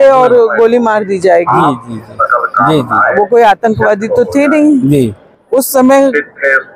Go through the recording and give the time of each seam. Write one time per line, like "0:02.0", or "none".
0:05.3